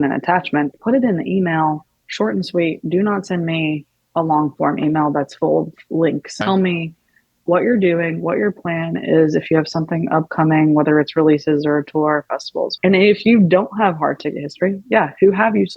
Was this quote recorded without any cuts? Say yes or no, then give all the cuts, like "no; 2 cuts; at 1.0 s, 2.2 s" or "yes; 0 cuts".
no; 3 cuts; at 0.8 s, 6.3 s, 12.7 s